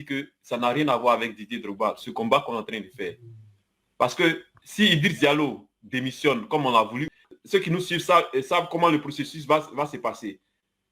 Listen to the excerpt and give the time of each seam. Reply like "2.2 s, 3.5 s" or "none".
7.0 s

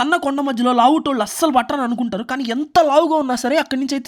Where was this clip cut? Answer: none

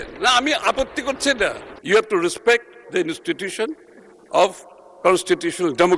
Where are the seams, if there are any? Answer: 1.7 s

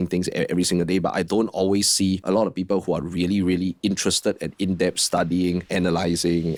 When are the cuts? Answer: none

